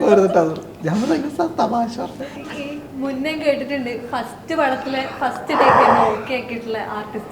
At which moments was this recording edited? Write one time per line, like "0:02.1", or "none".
none